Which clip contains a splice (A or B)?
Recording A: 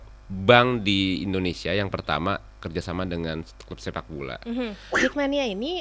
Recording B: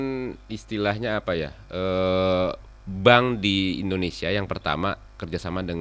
A